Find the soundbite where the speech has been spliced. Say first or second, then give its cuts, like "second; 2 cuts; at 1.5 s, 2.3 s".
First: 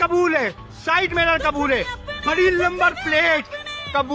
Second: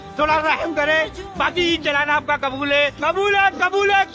second; 1 cut; at 1.6 s